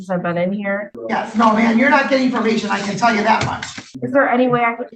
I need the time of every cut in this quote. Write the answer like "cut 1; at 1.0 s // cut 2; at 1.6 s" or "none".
cut 1; at 0.9 s // cut 2; at 3.9 s